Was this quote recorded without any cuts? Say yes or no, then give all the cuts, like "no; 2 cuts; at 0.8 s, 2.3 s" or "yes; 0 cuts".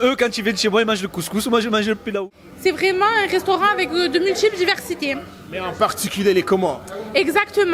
no; 1 cut; at 2.2 s